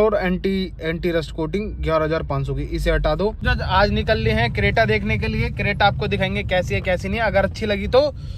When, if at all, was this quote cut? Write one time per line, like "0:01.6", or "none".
0:03.5